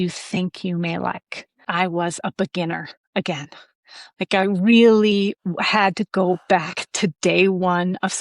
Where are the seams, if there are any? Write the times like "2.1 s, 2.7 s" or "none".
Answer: 1.7 s